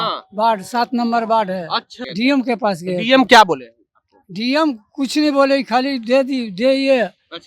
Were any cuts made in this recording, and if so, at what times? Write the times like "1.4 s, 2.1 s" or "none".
2.0 s